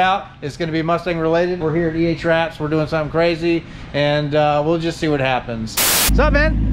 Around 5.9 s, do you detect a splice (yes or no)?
yes